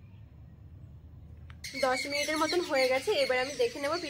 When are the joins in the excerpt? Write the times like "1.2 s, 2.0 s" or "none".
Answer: 1.6 s